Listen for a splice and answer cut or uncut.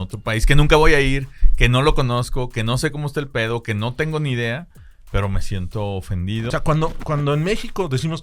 cut